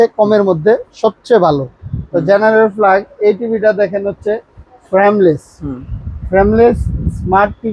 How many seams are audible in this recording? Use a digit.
0